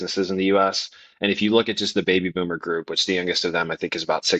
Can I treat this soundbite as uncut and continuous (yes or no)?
yes